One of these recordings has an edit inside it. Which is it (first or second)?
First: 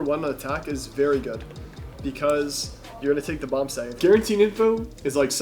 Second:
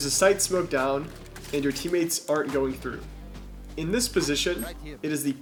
first